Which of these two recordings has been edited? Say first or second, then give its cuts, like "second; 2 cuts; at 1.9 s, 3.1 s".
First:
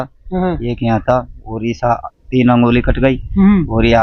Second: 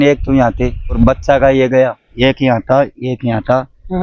second; 2 cuts; at 1.0 s, 2.0 s